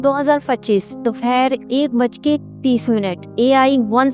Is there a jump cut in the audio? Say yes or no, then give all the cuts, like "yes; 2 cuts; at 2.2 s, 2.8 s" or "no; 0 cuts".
no; 0 cuts